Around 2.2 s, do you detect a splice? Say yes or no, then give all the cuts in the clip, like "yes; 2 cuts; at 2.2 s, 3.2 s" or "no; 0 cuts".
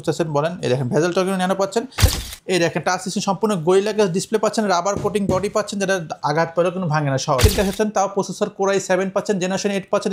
yes; 2 cuts; at 2.2 s, 7.4 s